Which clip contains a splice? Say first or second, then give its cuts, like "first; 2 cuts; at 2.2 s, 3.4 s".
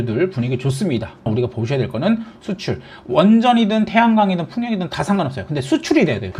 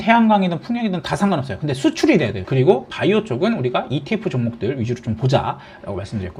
first; 2 cuts; at 1.3 s, 2.3 s